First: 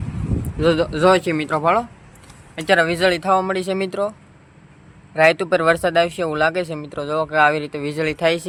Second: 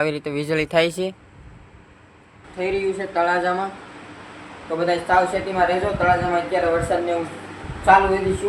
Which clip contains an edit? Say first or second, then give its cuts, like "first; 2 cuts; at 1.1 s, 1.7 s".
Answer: second; 1 cut; at 2.5 s